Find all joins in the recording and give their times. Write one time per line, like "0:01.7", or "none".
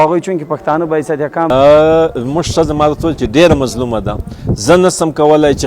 0:01.5